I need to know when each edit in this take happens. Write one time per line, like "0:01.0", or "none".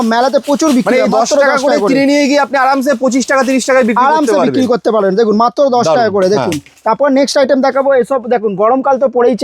none

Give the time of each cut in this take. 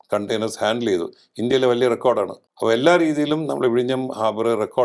0:02.4

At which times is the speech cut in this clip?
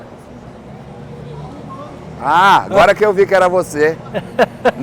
none

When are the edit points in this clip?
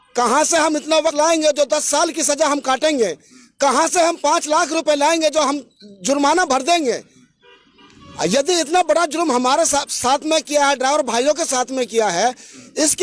0:01.1

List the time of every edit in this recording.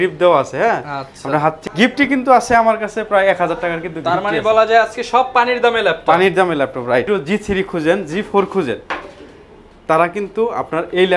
0:01.6
0:07.1

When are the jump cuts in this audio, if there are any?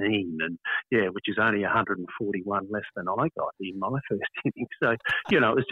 none

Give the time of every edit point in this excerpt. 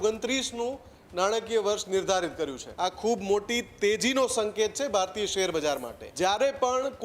0:02.6
0:06.0

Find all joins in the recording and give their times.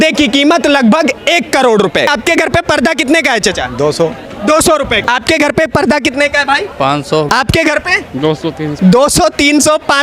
0:02.1
0:05.0
0:07.3
0:08.7

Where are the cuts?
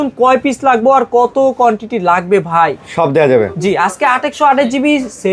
none

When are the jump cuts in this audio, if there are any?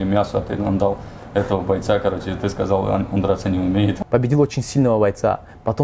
0:04.0

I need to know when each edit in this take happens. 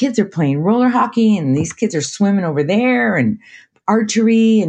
none

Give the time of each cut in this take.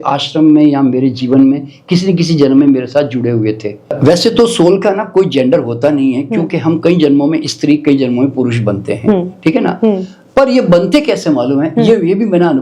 0:04.0

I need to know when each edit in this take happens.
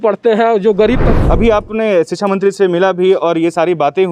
0:01.1

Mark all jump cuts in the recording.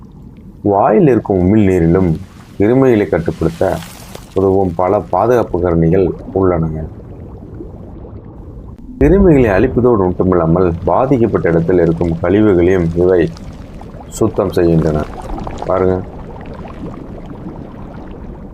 0:09.0

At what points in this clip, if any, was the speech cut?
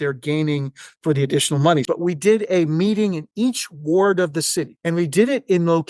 0:01.8
0:04.8

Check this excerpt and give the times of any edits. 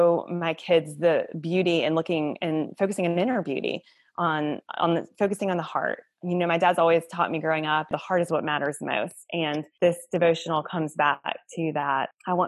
0:07.9
0:09.7

